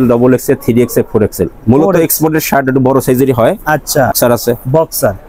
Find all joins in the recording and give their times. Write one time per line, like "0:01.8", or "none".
0:04.2